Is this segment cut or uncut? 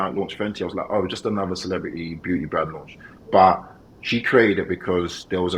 uncut